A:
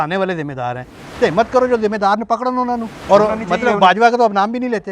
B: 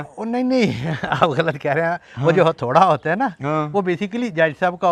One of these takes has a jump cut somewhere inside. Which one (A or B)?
A